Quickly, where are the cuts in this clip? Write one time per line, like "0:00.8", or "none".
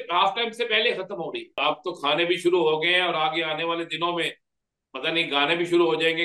0:01.6